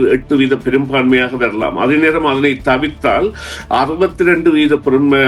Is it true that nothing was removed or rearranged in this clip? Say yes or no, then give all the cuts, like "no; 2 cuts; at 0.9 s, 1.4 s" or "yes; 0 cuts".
yes; 0 cuts